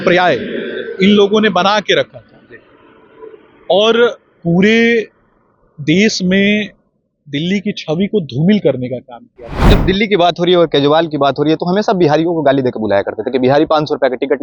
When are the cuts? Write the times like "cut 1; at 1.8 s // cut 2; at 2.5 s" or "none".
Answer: cut 1; at 9.6 s